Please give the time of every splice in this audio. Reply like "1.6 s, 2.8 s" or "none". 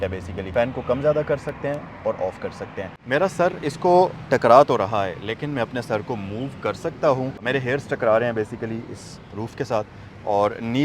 2.9 s